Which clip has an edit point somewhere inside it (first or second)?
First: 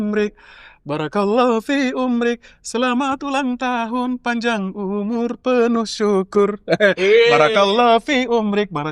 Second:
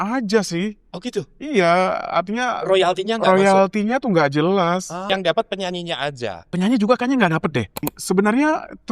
second